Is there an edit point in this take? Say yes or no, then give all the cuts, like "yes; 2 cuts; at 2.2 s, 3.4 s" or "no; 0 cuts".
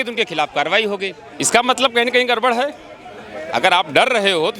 yes; 1 cut; at 1.2 s